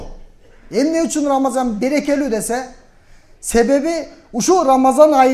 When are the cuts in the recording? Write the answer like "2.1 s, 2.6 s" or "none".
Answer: none